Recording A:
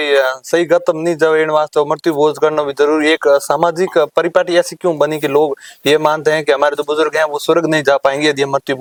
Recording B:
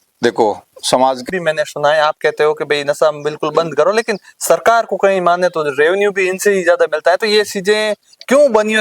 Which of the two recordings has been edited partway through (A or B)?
B